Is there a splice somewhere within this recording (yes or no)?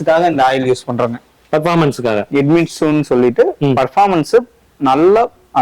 no